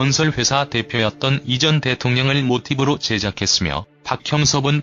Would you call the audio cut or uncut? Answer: cut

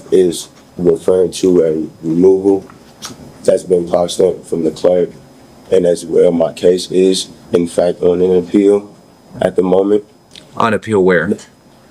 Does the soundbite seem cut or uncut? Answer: uncut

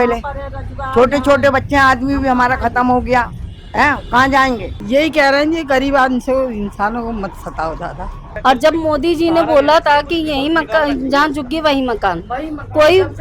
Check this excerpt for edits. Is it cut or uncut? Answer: cut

